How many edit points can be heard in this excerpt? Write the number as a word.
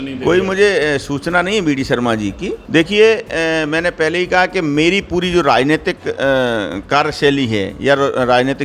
one